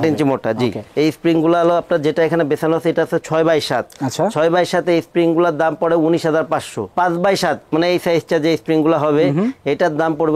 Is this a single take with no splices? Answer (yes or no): yes